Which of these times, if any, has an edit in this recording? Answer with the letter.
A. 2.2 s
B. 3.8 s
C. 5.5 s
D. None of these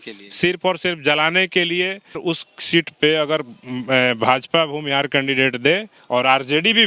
A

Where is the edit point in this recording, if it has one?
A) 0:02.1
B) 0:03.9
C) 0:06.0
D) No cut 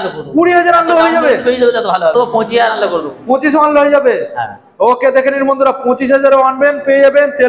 A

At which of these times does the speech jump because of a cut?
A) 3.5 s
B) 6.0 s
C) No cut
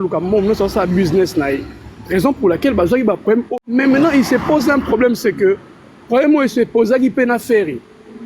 A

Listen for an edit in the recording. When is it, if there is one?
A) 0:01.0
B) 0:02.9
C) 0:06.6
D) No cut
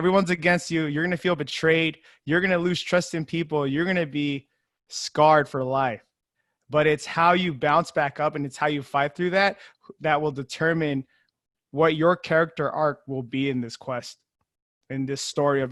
D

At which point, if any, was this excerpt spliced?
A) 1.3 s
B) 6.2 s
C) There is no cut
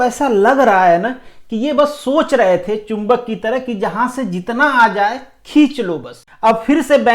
B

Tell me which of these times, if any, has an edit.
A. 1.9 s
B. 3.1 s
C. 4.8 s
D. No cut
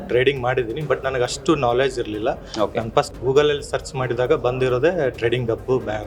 B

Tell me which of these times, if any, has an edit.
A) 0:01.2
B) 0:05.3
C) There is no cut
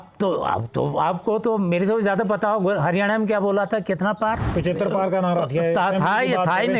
C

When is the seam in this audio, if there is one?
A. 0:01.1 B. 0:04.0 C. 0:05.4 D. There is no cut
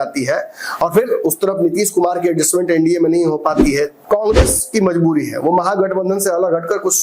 B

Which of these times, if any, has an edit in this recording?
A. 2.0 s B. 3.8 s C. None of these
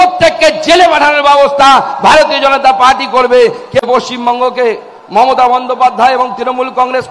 B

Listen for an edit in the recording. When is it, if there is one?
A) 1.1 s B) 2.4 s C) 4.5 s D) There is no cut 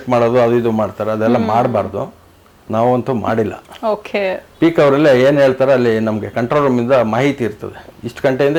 D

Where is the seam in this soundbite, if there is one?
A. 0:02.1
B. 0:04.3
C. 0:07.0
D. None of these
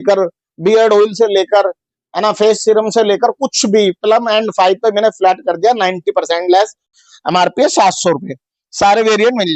C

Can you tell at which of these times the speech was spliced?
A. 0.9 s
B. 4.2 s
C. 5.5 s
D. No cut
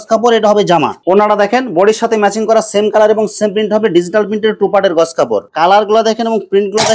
C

